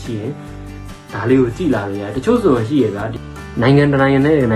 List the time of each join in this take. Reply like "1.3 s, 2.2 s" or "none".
3.1 s